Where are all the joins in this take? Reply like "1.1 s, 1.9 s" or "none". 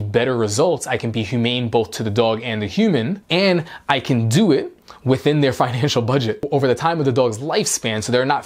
none